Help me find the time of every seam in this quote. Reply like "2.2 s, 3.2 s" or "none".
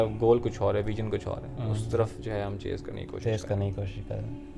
none